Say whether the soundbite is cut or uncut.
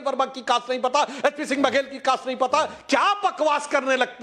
cut